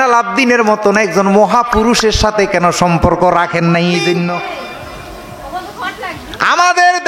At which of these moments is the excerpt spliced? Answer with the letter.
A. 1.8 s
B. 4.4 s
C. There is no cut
B